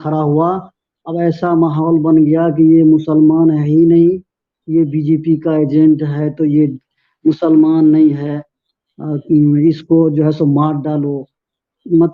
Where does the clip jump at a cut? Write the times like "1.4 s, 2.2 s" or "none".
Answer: none